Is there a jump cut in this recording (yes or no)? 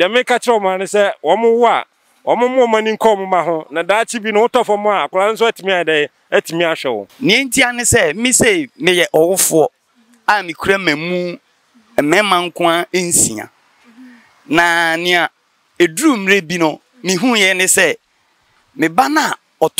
yes